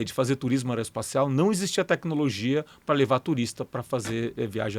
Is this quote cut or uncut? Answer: uncut